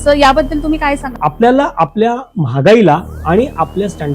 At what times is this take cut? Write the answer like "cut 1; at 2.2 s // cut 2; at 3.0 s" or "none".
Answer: cut 1; at 1.1 s